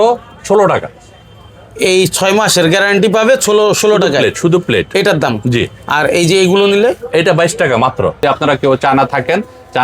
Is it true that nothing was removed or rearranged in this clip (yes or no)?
no